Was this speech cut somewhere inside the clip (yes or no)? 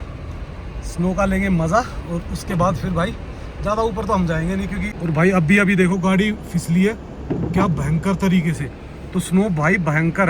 yes